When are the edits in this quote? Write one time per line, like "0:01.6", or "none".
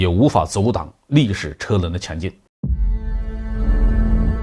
0:02.5